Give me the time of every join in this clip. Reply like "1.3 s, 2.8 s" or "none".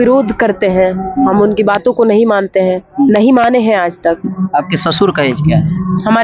4.3 s